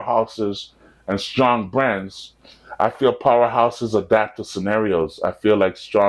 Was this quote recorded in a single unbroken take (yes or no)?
yes